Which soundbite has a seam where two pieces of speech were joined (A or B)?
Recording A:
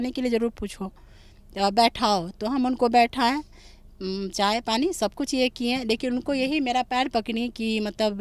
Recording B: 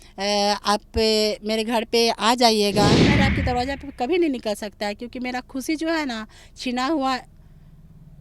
B